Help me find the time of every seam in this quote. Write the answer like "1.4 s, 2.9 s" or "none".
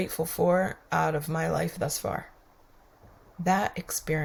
none